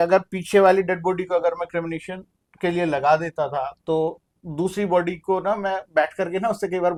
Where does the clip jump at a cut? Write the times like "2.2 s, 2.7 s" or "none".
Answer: none